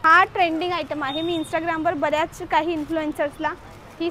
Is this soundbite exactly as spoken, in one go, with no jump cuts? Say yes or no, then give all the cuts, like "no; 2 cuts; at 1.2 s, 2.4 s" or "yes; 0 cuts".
yes; 0 cuts